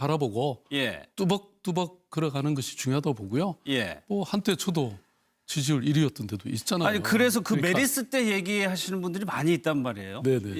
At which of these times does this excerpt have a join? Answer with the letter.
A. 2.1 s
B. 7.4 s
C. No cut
B